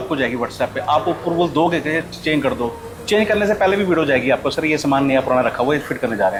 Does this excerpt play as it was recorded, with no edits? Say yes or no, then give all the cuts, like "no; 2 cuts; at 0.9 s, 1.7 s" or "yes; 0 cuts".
yes; 0 cuts